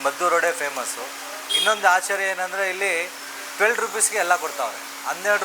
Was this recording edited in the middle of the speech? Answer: no; 0 cuts

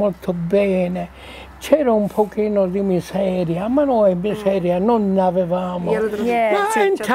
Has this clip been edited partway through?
yes; 1 cut; at 6.1 s

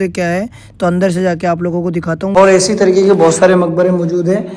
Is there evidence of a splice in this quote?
yes; 1 cut; at 2.3 s

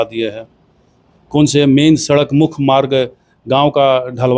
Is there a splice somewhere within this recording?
no; 0 cuts

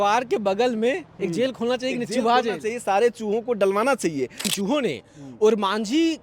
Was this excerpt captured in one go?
no; 1 cut; at 4.4 s

